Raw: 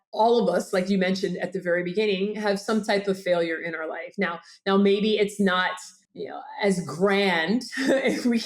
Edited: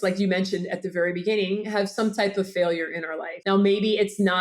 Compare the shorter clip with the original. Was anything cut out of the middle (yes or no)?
yes